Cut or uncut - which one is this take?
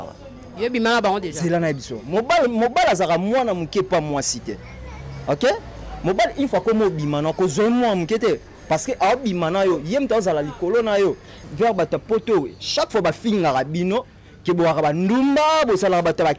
cut